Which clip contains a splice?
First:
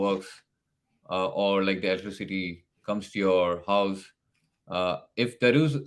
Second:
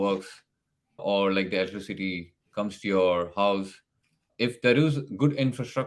second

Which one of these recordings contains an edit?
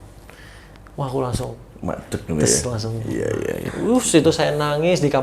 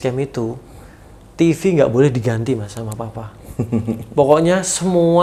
first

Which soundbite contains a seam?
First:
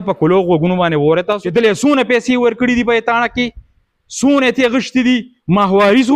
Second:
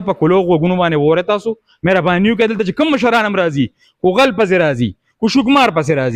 first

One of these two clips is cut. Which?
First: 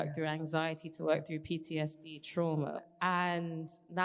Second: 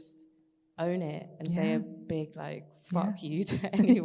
first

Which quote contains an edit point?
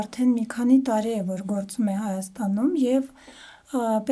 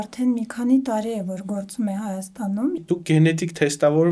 second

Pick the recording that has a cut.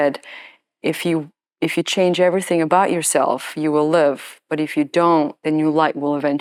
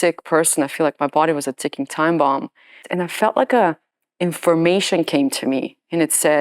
second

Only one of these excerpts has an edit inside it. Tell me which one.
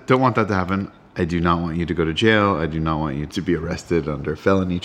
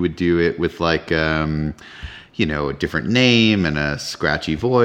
first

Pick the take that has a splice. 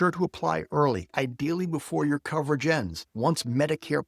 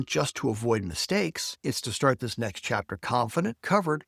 first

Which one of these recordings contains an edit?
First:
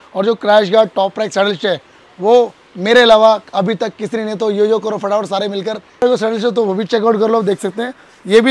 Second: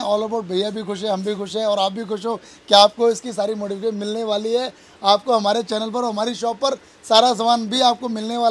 first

